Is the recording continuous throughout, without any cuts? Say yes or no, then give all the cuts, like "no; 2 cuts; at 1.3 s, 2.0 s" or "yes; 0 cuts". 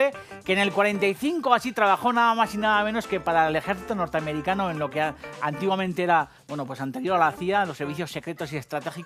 no; 1 cut; at 4.0 s